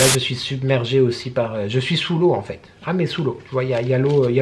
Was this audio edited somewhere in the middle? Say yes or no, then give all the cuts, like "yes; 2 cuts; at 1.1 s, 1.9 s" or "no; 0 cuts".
no; 0 cuts